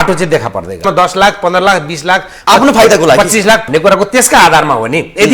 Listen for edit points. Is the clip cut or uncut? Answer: cut